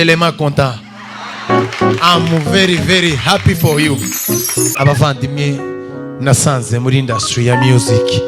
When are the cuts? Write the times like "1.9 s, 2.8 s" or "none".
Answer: 4.8 s